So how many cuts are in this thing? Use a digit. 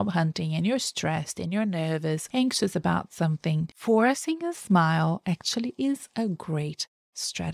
2